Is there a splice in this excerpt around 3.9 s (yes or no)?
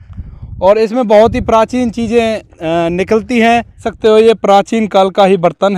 yes